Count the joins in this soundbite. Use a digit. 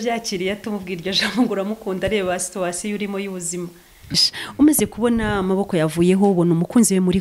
1